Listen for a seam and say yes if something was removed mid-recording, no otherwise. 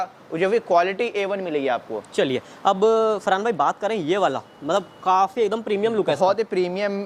no